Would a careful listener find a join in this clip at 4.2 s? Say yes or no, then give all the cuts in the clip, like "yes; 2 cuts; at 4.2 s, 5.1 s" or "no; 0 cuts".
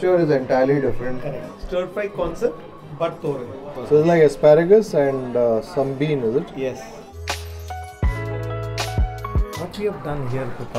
no; 2 cuts; at 1.5 s, 7.1 s